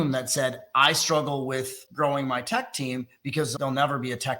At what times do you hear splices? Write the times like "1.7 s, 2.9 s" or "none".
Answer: 1.8 s, 3.5 s

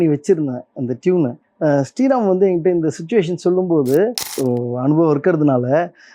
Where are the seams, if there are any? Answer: 4.3 s

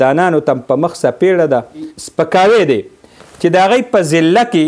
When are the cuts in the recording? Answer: 2.0 s

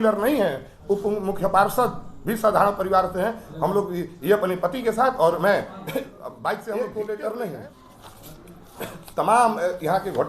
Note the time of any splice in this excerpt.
6.6 s

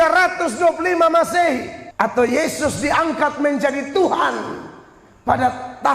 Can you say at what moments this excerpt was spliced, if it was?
1.8 s

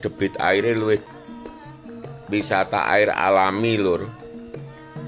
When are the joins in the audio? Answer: 1.1 s

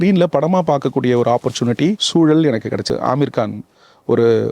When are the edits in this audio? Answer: 2.0 s, 2.9 s

